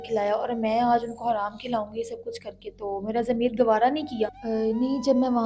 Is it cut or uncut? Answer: cut